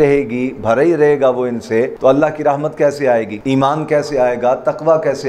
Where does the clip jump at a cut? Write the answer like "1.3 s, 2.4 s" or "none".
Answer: 1.9 s, 3.3 s

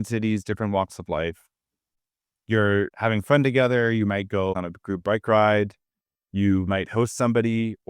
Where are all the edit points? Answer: 1.9 s, 4.6 s

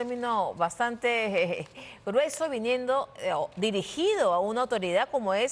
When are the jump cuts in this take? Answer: none

